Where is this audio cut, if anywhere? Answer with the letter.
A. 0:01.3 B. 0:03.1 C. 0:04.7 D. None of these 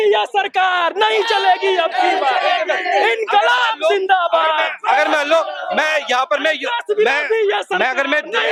D